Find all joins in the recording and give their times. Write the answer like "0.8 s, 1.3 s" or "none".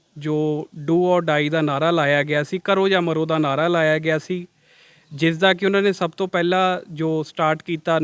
none